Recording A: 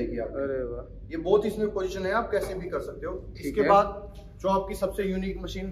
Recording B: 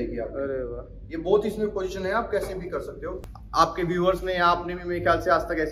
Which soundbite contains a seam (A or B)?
B